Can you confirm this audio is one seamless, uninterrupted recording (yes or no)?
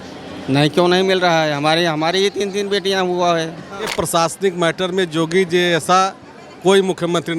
no